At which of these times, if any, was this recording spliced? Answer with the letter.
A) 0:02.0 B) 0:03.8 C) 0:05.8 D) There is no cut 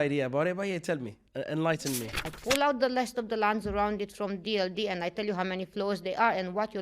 A